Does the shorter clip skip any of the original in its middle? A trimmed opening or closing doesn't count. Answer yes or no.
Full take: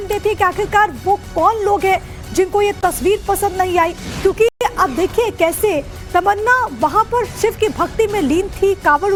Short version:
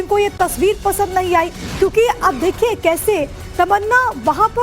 yes